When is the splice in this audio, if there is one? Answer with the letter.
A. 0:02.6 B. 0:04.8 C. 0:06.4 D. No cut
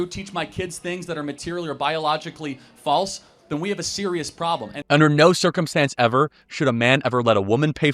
B